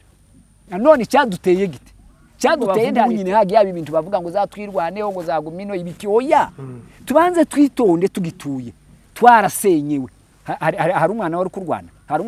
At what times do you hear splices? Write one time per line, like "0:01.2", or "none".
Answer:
0:03.1

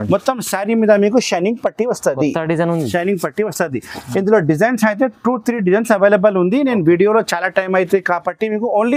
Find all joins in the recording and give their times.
none

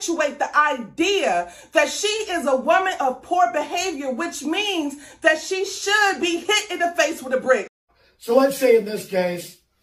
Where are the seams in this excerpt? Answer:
0:08.0

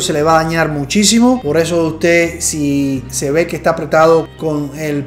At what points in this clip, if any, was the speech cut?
0:01.4

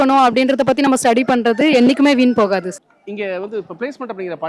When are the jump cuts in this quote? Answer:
0:02.8

